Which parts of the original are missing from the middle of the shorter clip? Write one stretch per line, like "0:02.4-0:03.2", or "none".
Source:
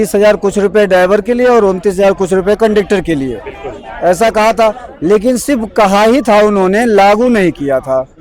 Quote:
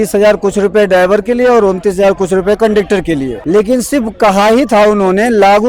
0:03.3-0:04.9